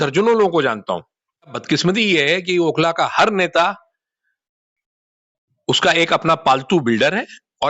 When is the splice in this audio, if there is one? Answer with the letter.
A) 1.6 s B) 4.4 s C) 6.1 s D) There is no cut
A